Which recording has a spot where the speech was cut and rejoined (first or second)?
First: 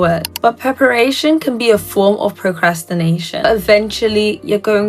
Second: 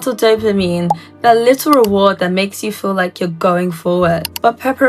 first